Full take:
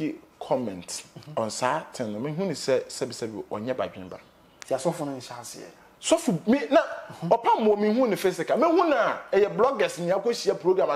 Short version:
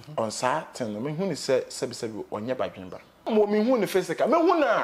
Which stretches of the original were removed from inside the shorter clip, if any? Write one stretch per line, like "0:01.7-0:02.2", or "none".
0:04.5-0:07.6